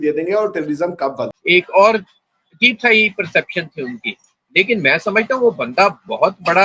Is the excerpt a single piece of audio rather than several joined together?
no; 1 cut; at 1.3 s

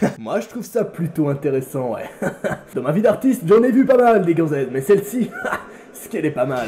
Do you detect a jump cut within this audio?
no; 0 cuts

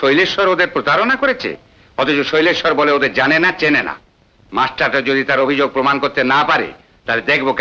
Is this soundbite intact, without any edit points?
yes; 0 cuts

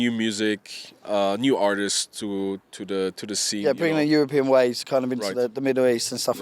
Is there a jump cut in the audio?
no; 0 cuts

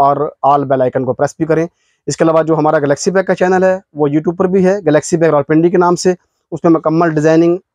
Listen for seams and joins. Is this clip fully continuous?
yes; 0 cuts

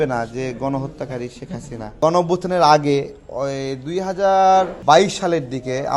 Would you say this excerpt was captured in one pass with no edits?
no; 2 cuts; at 2.0 s, 4.8 s

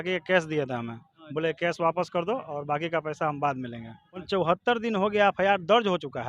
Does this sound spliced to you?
yes; 1 cut; at 4.2 s

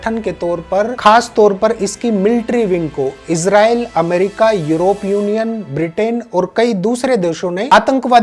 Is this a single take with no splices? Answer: yes; 0 cuts

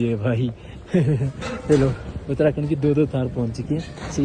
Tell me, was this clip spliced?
no; 0 cuts

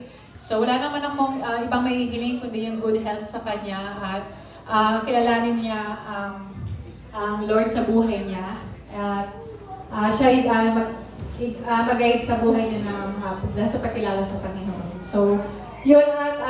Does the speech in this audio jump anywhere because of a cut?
no; 0 cuts

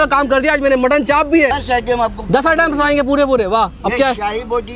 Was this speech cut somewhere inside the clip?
yes; 1 cut; at 1.6 s

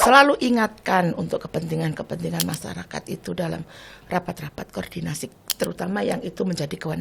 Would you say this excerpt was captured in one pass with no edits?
yes; 0 cuts

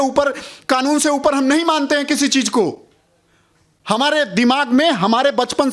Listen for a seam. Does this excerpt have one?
no; 0 cuts

